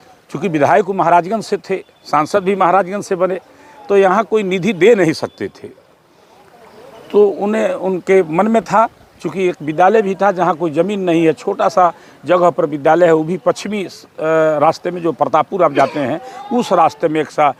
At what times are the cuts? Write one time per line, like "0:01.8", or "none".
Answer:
none